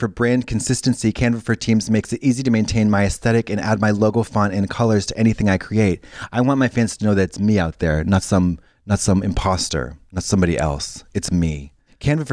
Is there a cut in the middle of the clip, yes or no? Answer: no